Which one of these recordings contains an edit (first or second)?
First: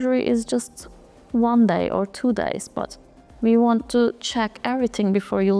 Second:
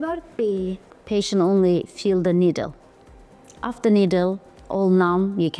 second